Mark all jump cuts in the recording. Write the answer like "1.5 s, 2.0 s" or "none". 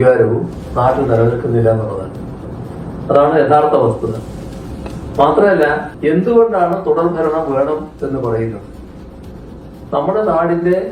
5.9 s